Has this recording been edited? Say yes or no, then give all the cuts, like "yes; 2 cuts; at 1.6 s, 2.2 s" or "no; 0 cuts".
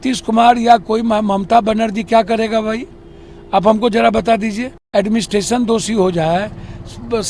yes; 1 cut; at 4.7 s